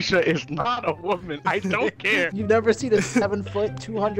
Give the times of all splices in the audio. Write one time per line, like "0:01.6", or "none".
0:02.4